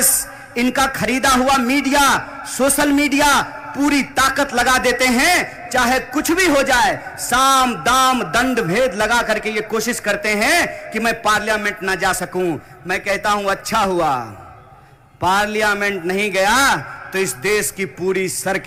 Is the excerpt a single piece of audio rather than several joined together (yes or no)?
yes